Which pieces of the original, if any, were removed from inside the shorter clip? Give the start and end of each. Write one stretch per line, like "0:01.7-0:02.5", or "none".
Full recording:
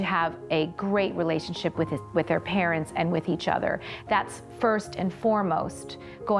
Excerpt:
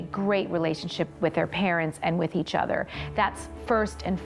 0:01.7-0:02.0